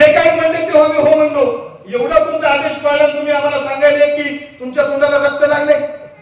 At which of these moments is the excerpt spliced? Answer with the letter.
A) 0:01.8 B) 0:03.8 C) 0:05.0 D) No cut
D